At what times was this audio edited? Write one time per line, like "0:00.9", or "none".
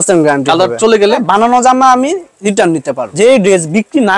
0:01.2
0:03.0

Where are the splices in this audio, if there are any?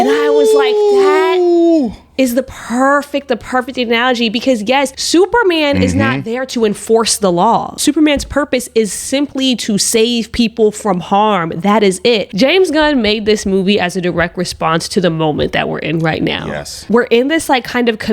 0:05.0
0:07.7
0:12.3
0:16.9

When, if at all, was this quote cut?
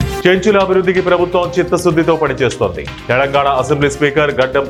none

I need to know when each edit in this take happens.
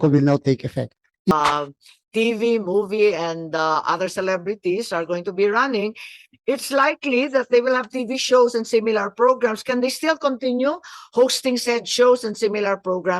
0:01.3

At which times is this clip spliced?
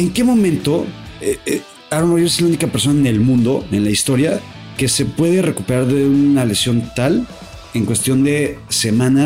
none

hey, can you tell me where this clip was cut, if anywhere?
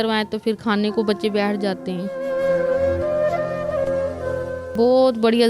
0:02.1
0:04.7

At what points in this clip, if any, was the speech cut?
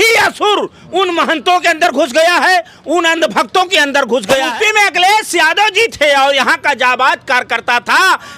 0:04.5

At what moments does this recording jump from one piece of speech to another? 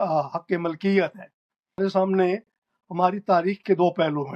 0:01.8

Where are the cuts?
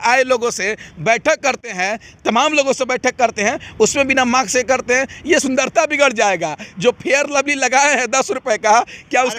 0:05.4

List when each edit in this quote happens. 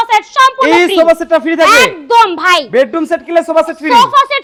none

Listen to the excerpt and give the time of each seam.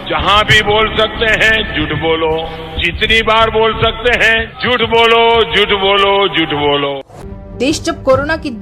0:07.2

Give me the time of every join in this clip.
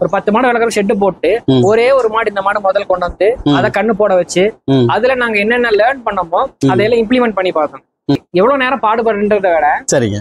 0:08.2

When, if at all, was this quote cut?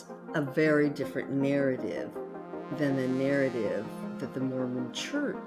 none

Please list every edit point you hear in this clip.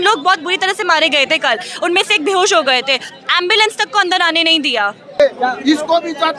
0:05.2

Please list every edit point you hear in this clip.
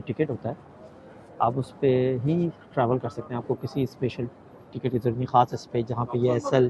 none

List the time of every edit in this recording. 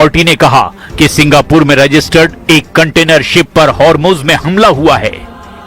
0:01.7

